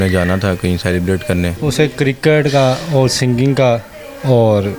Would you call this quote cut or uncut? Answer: cut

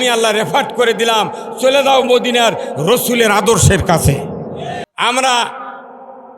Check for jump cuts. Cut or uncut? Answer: cut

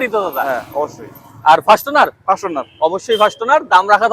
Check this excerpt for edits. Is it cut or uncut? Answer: uncut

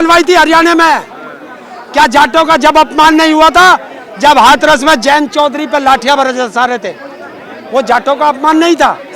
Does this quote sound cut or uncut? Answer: uncut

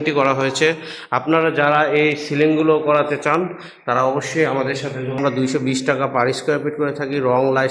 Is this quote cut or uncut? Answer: cut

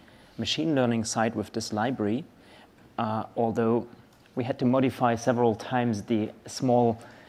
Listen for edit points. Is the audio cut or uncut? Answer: uncut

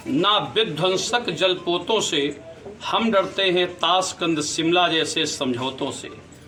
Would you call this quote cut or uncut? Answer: uncut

